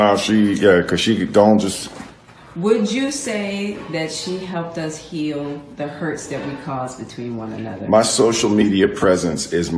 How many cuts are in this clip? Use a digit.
2